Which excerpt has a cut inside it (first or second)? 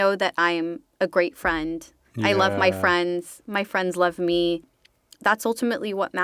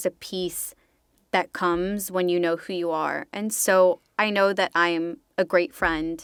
first